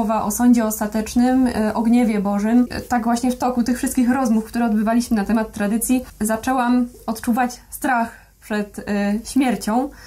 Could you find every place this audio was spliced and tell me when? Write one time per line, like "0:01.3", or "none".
0:02.8
0:06.1